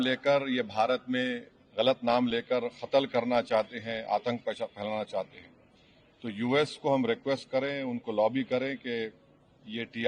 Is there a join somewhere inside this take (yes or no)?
no